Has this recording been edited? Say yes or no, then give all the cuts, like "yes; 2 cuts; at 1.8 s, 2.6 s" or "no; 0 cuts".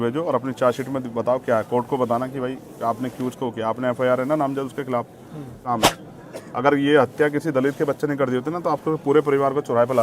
yes; 1 cut; at 5.6 s